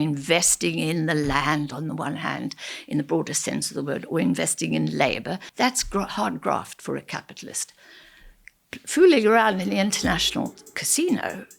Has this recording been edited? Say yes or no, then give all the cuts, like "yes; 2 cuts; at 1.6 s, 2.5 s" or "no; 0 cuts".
yes; 1 cut; at 5.5 s